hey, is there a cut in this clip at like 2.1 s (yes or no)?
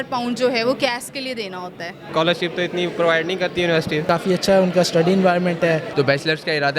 yes